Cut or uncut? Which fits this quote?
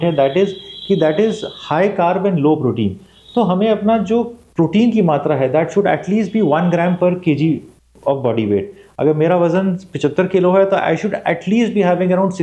uncut